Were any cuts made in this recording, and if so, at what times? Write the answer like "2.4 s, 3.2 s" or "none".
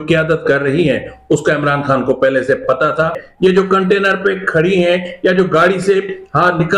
3.2 s